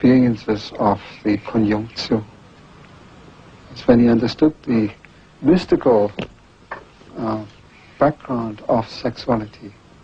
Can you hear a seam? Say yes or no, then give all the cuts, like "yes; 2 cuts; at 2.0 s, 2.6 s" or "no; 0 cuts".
yes; 1 cut; at 1.4 s